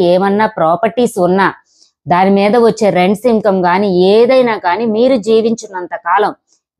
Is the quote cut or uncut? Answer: uncut